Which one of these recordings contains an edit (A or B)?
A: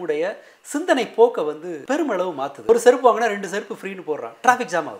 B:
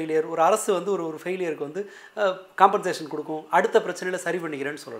A